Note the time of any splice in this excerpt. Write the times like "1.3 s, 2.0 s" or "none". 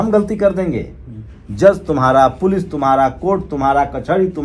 none